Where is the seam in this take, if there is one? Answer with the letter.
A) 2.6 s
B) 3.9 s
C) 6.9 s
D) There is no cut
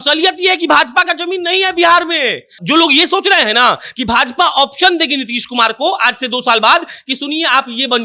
A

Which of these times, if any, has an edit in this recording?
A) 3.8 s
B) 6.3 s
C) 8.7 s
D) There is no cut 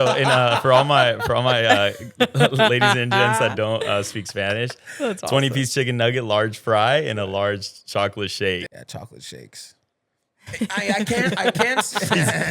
C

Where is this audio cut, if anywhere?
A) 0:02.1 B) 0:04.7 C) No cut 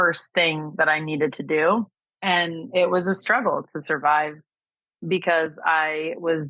A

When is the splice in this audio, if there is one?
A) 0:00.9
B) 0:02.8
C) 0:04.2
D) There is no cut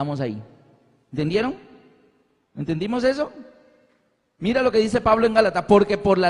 B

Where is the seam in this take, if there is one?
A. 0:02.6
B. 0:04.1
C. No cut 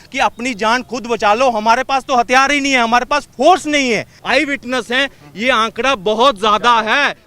B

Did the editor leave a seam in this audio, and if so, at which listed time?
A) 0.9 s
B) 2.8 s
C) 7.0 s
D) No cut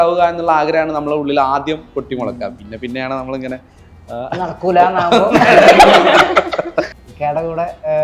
C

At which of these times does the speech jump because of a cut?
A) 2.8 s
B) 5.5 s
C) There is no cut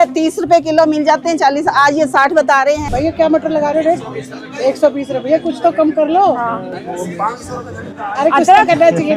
A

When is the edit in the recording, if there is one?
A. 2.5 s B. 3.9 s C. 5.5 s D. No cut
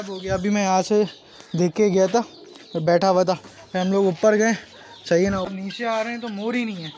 C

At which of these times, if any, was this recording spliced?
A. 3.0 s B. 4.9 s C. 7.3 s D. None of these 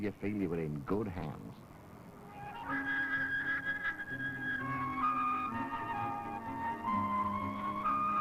C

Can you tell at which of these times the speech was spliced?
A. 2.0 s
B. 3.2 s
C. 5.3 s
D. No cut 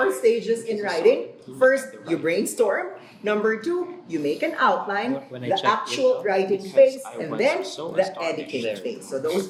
D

